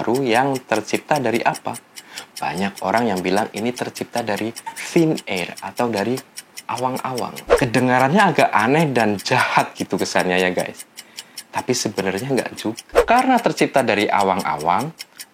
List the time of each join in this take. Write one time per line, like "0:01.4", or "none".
0:07.4
0:12.9